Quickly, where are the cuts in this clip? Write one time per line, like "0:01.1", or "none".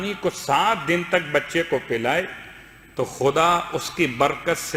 none